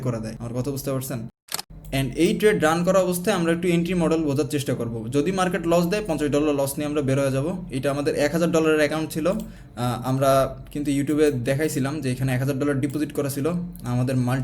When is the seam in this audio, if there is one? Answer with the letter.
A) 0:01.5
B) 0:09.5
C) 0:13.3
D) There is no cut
A